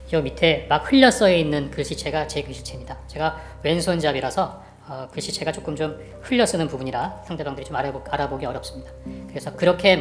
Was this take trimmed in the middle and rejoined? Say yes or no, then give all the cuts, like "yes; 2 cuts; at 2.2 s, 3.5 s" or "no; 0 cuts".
no; 0 cuts